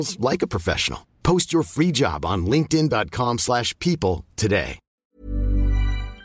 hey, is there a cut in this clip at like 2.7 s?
no; 1 cut; at 4.9 s

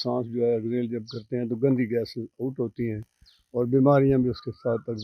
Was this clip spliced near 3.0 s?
no; 0 cuts

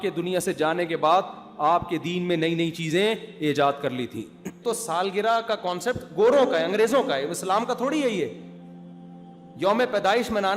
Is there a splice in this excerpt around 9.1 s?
no; 1 cut; at 4.6 s

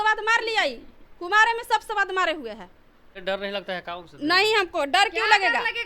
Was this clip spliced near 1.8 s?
no; 1 cut; at 3.2 s

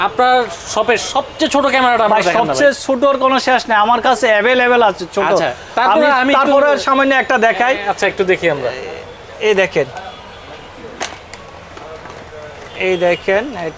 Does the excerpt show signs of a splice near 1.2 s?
no; 0 cuts

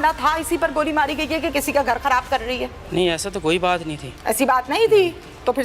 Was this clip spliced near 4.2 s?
no; 1 cut; at 2.8 s

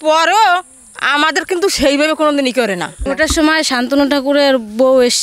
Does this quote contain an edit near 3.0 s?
yes; 1 cut; at 3.0 s

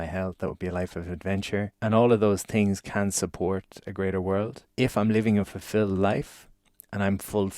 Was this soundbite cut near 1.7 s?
yes; 2 cuts; at 1.7 s, 4.6 s

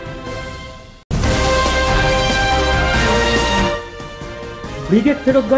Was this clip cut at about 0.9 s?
yes; 2 cuts; at 0.9 s, 4.0 s

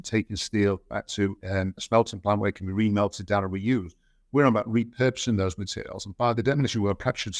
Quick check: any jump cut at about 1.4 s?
no; 1 cut; at 6.3 s

